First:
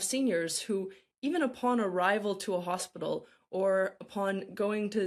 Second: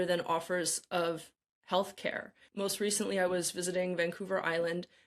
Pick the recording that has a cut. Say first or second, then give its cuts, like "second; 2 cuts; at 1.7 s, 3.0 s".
second; 1 cut; at 2.4 s